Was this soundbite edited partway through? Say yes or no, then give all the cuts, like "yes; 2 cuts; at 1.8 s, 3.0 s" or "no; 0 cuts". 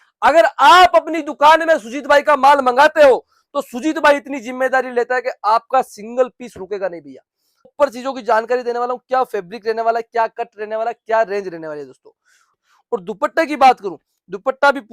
yes; 2 cuts; at 7.7 s, 12.4 s